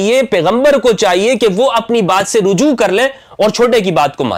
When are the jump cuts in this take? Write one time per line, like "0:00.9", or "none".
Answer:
none